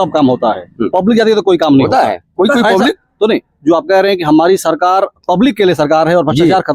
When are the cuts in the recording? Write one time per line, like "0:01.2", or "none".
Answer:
none